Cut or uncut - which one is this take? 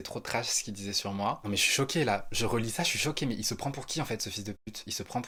uncut